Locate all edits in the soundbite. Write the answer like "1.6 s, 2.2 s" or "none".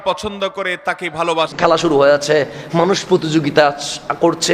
1.5 s